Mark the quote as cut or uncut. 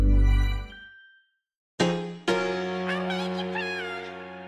cut